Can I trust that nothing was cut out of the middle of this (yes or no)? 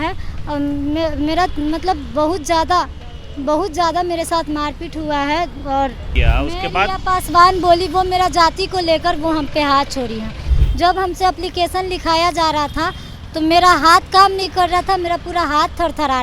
no